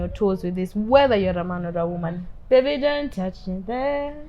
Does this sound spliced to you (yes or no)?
yes